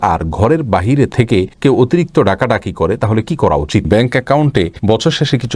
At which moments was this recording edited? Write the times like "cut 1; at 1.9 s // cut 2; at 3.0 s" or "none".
cut 1; at 3.9 s